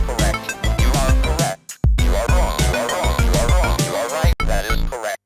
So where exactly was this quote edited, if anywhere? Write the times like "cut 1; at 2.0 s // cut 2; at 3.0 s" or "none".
cut 1; at 4.3 s